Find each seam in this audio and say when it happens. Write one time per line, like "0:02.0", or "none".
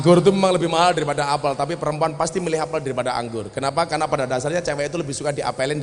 none